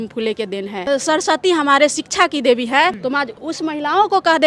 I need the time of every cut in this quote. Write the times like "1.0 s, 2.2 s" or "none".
0.9 s, 3.5 s